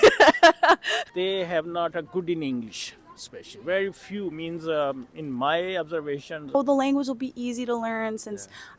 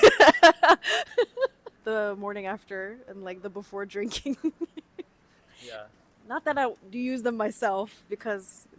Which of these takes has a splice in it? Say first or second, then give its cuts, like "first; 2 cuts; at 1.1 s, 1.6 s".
first; 2 cuts; at 1.0 s, 6.5 s